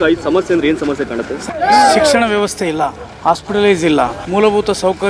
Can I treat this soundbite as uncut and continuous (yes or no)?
no